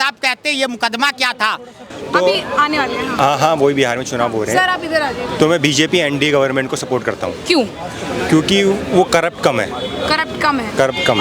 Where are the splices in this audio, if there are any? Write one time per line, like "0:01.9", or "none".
0:01.9